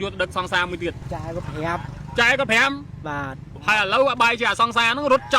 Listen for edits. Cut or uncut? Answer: cut